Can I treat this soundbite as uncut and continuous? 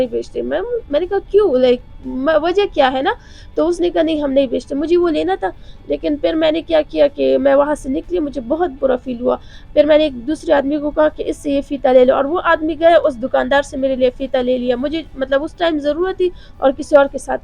yes; 0 cuts

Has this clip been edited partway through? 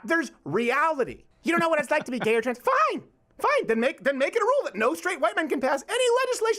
yes; 1 cut; at 1.2 s

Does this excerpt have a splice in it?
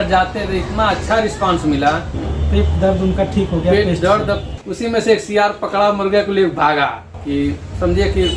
yes; 3 cuts; at 2.2 s, 4.5 s, 7.1 s

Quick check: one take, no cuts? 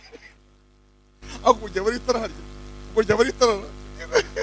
no; 1 cut; at 1.0 s

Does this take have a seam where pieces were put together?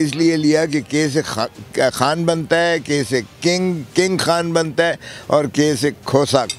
no; 0 cuts

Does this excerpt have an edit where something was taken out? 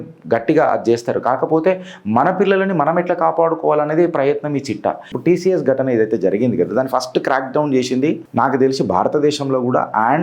yes; 2 cuts; at 5.1 s, 8.2 s

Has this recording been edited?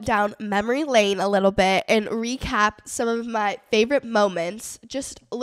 no; 0 cuts

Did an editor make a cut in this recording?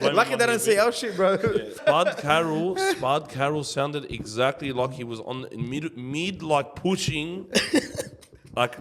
yes; 1 cut; at 1.8 s

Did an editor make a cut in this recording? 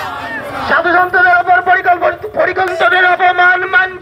yes; 1 cut; at 2.0 s

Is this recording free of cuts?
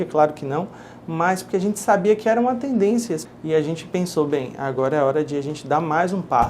no; 1 cut; at 3.3 s

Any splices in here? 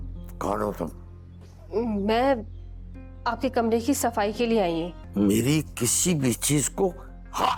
yes; 1 cut; at 5.0 s

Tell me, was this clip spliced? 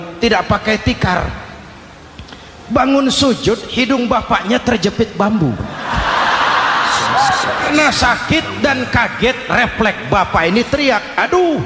yes; 1 cut; at 7.7 s

